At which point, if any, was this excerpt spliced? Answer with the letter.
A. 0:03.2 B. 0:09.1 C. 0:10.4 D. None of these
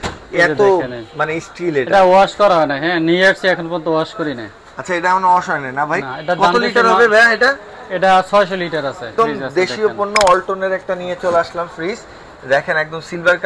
B